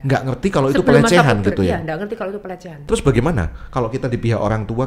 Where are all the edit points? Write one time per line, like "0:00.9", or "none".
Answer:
0:02.7